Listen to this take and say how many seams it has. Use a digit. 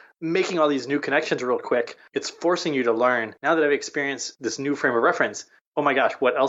2